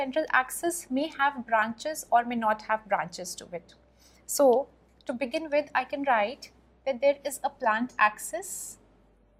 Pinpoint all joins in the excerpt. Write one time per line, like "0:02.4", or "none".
none